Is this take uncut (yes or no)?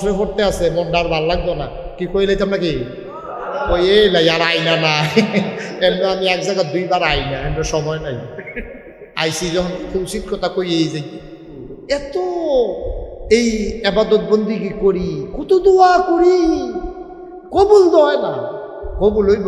no